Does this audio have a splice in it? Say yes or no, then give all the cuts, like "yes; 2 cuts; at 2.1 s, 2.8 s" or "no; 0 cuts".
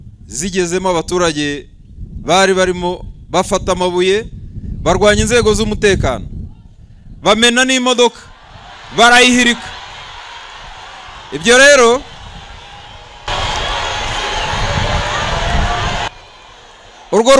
yes; 1 cut; at 16.1 s